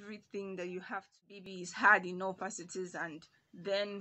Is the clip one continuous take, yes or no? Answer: no